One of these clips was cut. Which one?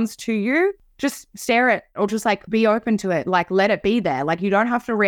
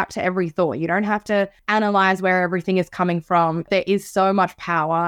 second; 2 cuts; at 1.6 s, 3.7 s

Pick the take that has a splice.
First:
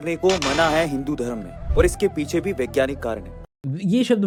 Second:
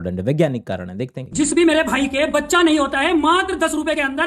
second; 1 cut; at 1.1 s

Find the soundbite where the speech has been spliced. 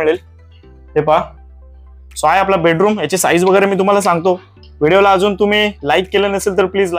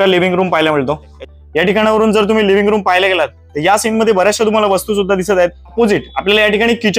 second; 2 cuts; at 1.2 s, 5.7 s

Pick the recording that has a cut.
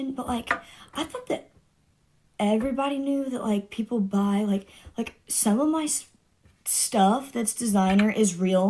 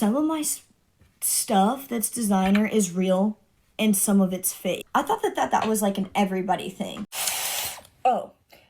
second; 2 cuts; at 4.8 s, 7.3 s

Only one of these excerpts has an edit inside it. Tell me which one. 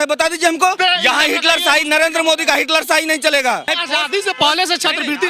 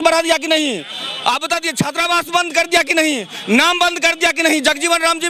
first; 2 cuts; at 0.8 s, 3.7 s

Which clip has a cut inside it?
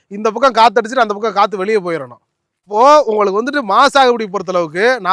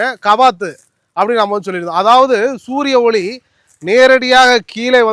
first; 1 cut; at 2.7 s

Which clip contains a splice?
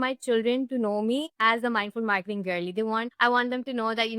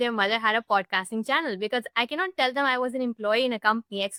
first; 2 cuts; at 1.3 s, 3.1 s

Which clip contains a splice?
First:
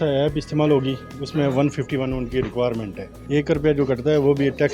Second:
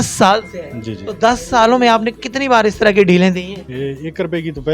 first; 1 cut; at 3.3 s

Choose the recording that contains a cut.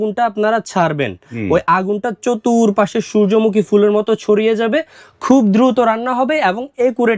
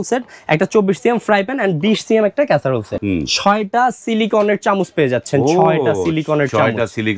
second; 1 cut; at 2.9 s

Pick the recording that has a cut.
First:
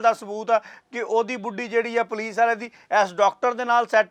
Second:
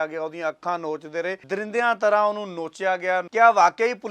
second; 2 cuts; at 1.4 s, 3.3 s

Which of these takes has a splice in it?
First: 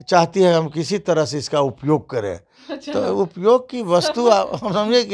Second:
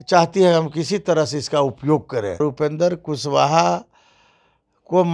second; 1 cut; at 2.4 s

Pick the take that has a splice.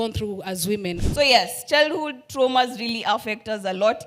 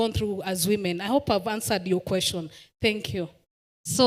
first; 1 cut; at 1.0 s

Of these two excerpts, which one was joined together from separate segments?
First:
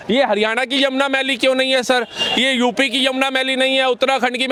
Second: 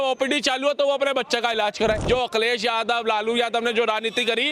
second; 1 cut; at 2.0 s

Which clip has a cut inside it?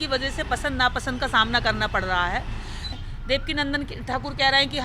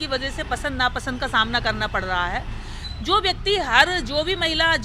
first; 1 cut; at 2.9 s

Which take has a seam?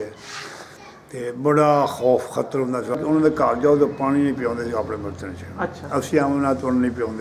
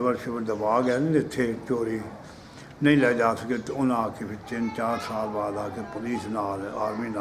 first; 1 cut; at 3.0 s

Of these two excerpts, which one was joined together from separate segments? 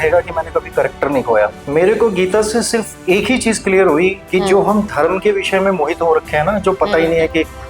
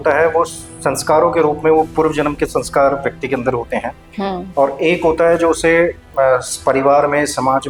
first; 1 cut; at 1.6 s

